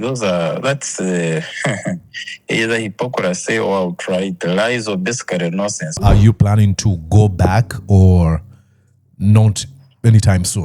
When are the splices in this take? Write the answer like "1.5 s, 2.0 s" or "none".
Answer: 6.0 s